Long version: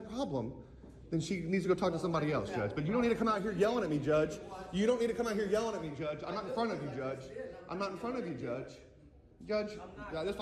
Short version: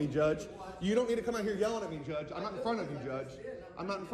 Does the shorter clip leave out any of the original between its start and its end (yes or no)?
no